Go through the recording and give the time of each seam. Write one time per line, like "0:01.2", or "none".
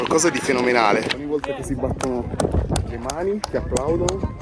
0:01.1